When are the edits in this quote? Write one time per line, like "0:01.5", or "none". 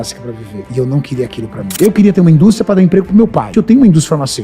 0:01.7
0:03.5